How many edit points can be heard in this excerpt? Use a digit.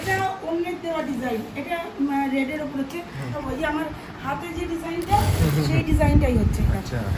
1